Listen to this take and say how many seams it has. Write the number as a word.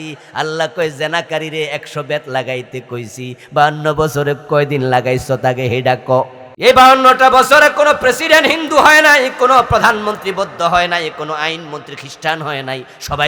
one